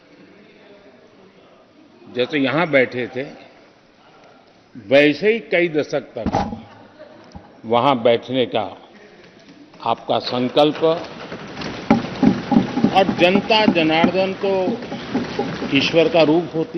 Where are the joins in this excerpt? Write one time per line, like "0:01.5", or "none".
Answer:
none